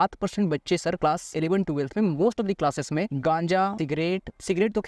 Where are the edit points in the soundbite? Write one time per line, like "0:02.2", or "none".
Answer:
0:01.1
0:03.1
0:03.8

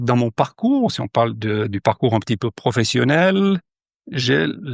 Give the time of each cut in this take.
none

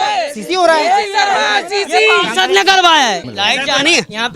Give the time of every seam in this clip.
0:03.3

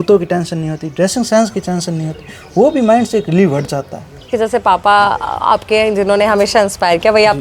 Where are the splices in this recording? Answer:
0:04.3

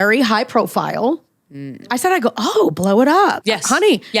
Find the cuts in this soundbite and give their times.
0:01.9
0:03.4

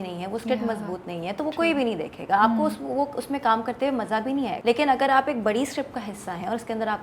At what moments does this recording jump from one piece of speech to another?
0:04.6

